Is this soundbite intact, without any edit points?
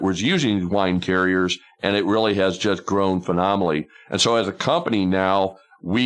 yes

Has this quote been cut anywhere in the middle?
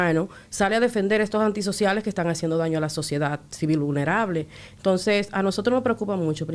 no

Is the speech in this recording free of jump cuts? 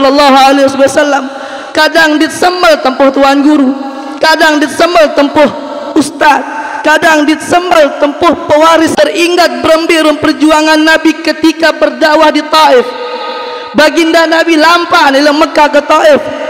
no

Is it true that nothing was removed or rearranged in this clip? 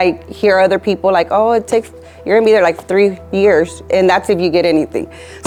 yes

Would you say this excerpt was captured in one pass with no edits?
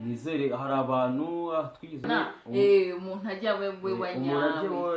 no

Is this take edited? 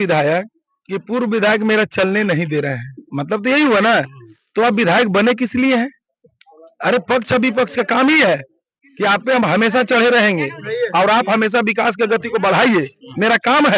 no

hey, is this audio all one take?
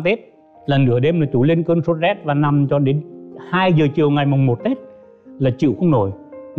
yes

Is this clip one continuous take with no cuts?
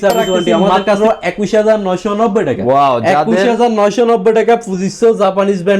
no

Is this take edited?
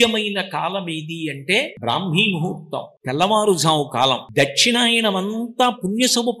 yes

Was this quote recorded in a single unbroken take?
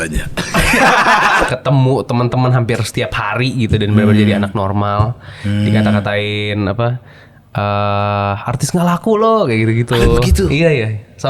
no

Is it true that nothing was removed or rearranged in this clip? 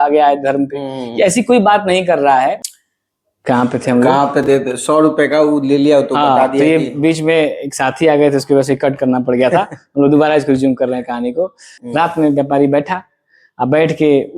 no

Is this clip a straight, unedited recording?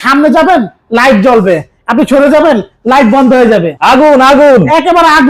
no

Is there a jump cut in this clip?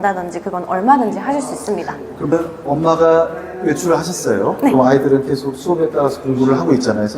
yes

